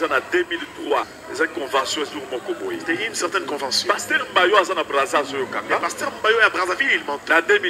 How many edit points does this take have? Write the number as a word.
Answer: one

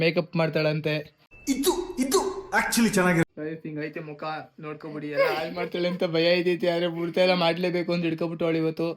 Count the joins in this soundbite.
one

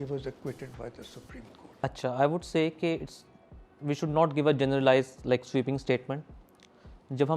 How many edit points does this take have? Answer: zero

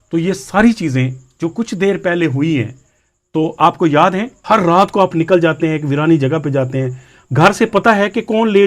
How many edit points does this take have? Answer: one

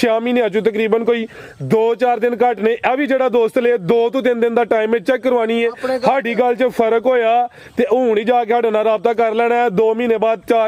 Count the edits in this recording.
zero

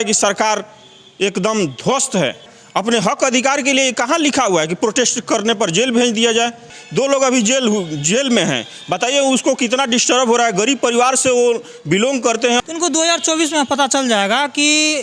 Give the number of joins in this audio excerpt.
three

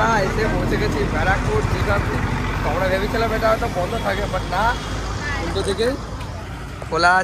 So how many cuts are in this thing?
zero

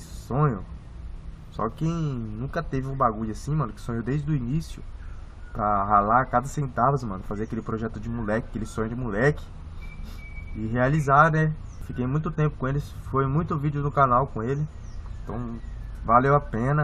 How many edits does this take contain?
one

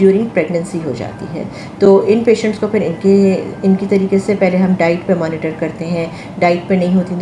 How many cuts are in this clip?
zero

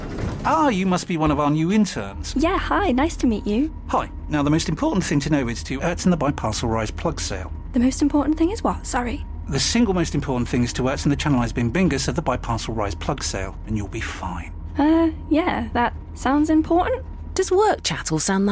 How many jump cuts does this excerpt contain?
zero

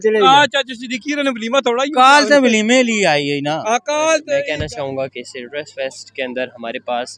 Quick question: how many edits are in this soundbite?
one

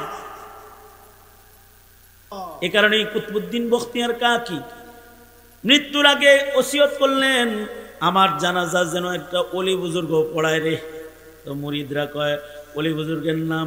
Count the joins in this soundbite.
one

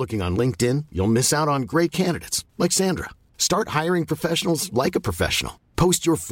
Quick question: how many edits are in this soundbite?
zero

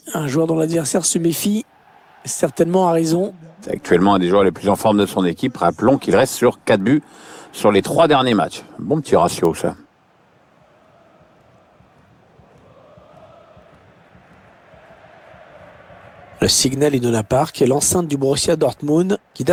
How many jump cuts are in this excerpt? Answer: zero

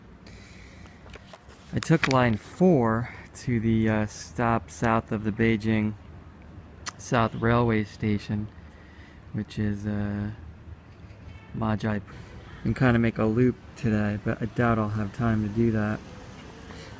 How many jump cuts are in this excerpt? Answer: zero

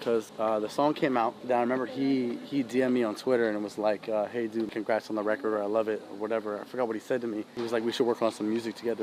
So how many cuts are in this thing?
three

